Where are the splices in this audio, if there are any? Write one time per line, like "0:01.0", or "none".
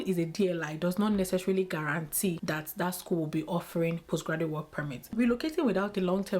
0:02.4
0:05.1